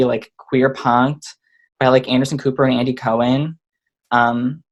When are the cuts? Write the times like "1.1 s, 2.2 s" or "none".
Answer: none